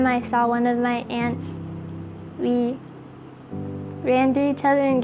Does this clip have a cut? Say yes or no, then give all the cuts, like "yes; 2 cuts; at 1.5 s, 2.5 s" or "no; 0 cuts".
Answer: no; 0 cuts